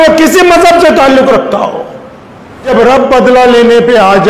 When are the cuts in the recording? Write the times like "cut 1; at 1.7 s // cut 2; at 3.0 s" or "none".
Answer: cut 1; at 2.7 s